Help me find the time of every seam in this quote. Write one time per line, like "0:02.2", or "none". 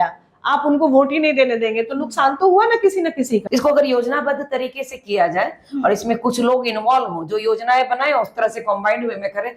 0:03.4